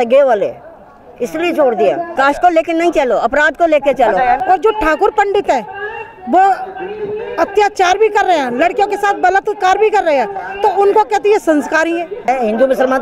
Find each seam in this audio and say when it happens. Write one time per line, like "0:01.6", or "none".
0:02.1
0:04.4
0:12.3

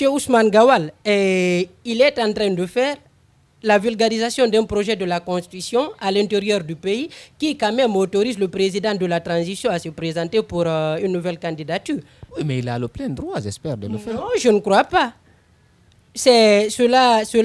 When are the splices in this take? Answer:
none

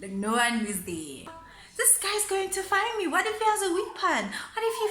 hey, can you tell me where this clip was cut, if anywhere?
0:01.5

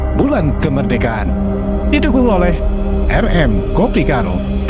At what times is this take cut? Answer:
none

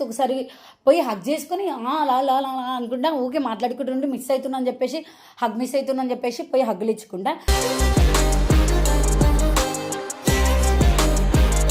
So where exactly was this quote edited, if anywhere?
none

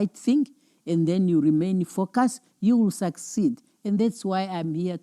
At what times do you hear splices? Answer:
none

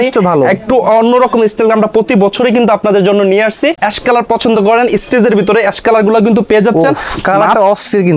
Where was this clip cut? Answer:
0:03.8

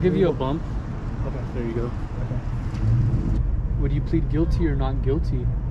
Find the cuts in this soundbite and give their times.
0:03.4

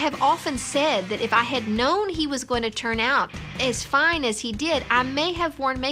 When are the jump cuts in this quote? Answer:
none

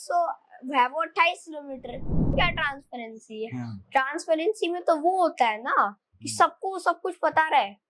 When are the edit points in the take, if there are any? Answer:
0:02.3

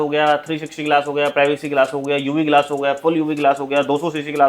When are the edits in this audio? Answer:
none

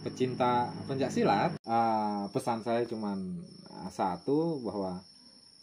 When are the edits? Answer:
0:01.6

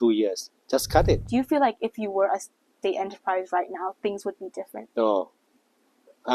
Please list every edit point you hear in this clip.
0:01.2
0:04.8

